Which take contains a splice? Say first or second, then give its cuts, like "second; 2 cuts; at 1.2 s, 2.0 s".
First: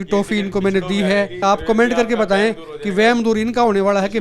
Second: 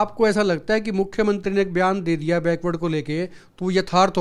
first; 1 cut; at 1.4 s